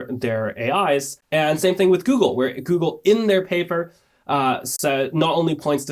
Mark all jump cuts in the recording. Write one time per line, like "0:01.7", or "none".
0:01.2